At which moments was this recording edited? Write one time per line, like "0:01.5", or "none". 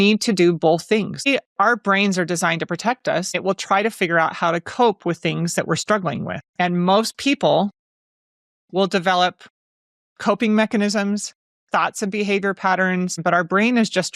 0:01.3
0:03.4
0:06.4
0:13.2